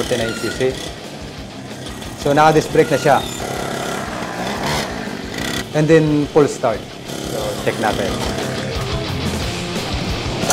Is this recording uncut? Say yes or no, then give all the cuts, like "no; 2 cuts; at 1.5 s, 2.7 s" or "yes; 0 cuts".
yes; 0 cuts